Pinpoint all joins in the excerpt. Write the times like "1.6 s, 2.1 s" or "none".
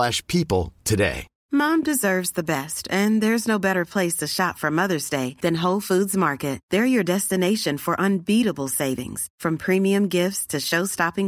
1.3 s